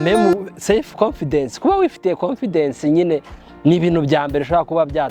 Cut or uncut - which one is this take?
uncut